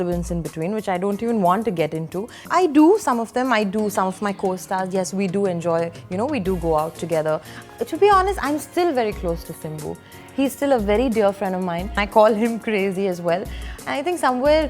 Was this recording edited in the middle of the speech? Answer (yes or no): yes